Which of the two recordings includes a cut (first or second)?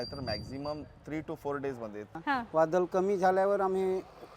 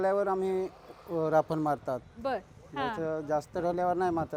first